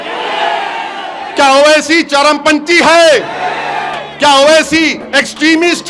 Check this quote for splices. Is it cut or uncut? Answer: uncut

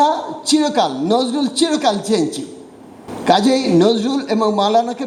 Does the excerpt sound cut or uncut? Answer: uncut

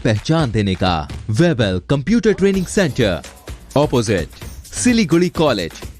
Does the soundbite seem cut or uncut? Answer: cut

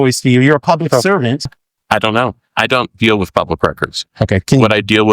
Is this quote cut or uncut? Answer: cut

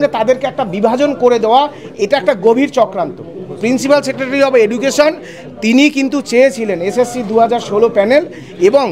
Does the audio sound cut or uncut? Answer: uncut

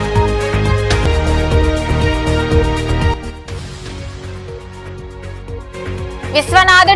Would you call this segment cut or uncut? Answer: uncut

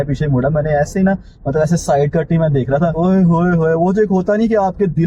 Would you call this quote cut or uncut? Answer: uncut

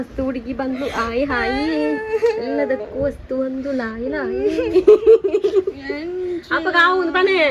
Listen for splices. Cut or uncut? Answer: uncut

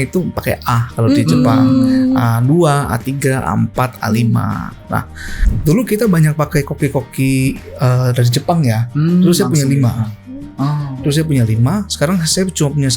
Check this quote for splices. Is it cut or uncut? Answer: cut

